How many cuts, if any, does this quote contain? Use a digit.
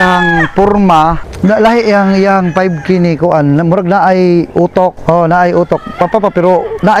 2